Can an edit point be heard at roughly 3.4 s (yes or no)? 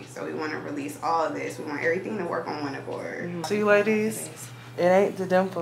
yes